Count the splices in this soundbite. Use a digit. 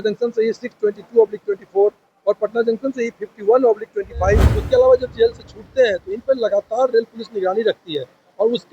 1